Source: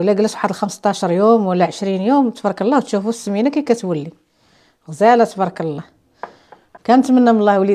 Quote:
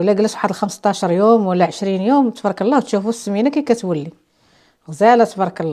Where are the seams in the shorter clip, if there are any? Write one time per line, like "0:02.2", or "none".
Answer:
none